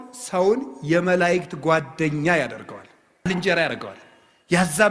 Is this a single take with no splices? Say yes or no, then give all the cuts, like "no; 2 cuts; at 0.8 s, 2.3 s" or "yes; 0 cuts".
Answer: no; 1 cut; at 3.3 s